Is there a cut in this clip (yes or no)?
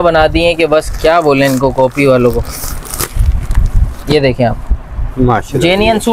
no